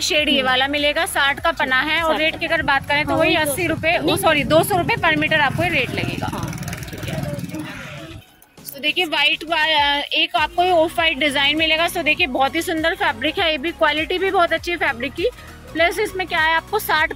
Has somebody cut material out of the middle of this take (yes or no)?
no